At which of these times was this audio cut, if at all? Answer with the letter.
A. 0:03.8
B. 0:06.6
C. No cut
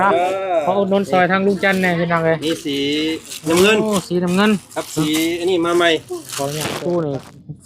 B